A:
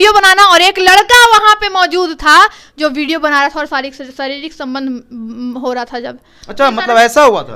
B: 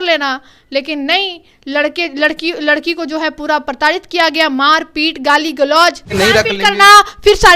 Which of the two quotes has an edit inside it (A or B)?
B